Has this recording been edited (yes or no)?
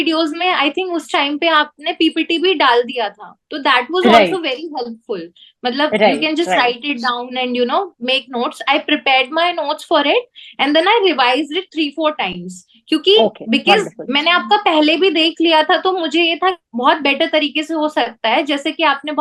yes